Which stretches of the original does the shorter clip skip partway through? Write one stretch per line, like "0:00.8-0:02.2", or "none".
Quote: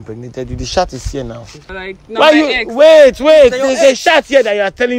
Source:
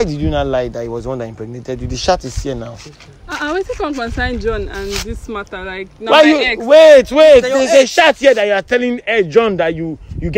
0:03.0-0:05.6